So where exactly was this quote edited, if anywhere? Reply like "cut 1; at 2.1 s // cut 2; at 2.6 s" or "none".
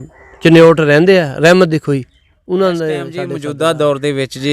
cut 1; at 3.2 s